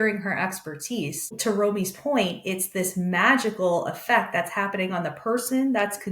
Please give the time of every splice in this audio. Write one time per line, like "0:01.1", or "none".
0:01.4